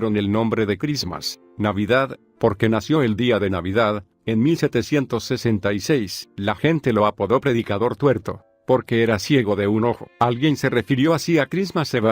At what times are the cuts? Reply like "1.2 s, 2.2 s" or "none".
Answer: 9.5 s